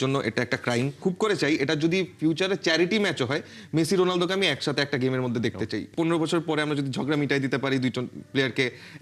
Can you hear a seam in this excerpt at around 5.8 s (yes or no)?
yes